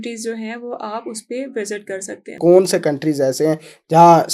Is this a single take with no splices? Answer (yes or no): no